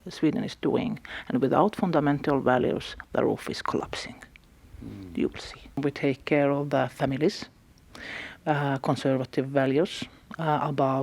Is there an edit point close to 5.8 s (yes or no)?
yes